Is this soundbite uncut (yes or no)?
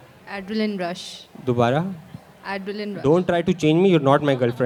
yes